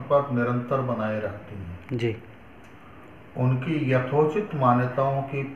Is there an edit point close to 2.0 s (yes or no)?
no